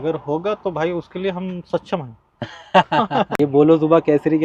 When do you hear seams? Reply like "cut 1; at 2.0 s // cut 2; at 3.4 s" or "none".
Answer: cut 1; at 3.3 s